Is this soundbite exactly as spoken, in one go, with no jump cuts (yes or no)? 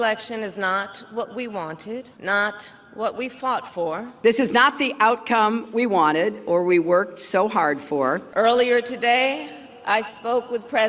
no